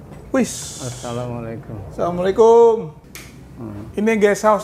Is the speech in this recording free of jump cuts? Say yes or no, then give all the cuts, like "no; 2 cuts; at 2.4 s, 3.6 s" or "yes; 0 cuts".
yes; 0 cuts